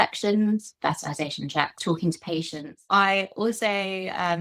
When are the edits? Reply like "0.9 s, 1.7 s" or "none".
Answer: 1.8 s, 2.8 s